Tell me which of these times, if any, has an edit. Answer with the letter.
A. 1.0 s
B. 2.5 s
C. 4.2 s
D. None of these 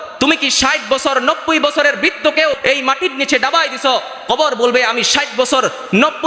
B